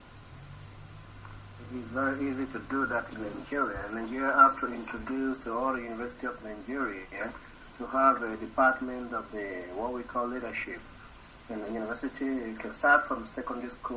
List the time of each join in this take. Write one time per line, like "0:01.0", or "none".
0:11.9